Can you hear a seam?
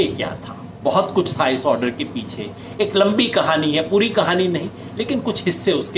no; 0 cuts

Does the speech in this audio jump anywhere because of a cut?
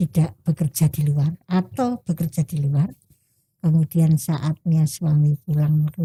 no; 0 cuts

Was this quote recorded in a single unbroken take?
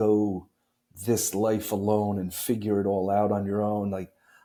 yes; 0 cuts

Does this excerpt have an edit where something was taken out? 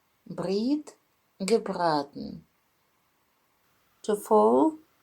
yes; 1 cut; at 3.3 s

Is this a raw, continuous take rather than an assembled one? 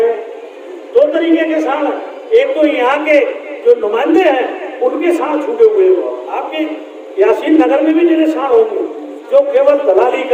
yes; 0 cuts

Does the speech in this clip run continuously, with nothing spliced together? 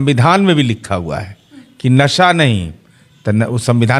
yes; 0 cuts

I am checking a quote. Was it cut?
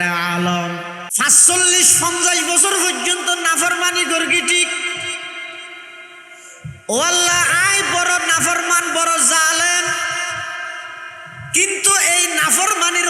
yes; 1 cut; at 1.0 s

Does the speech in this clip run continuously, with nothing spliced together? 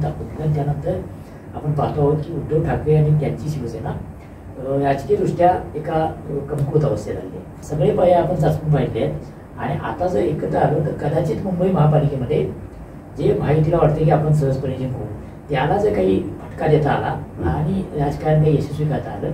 no; 1 cut; at 7.6 s

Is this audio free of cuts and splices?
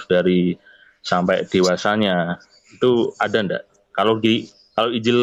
yes; 0 cuts

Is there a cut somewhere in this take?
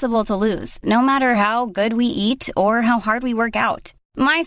no; 0 cuts

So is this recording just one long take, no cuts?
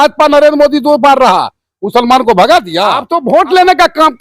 no; 1 cut; at 3.1 s

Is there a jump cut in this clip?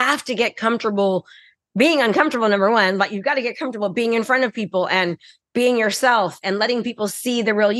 no; 0 cuts

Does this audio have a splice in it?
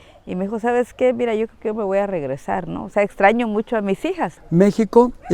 yes; 1 cut; at 4.3 s

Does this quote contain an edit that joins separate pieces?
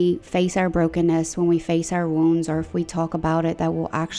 no; 0 cuts

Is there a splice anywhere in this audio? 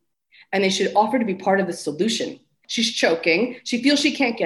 yes; 1 cut; at 2.6 s

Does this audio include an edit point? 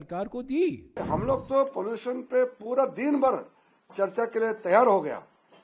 yes; 1 cut; at 0.9 s

